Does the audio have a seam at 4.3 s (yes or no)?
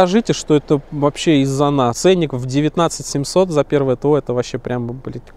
no